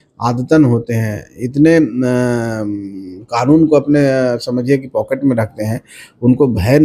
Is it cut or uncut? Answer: uncut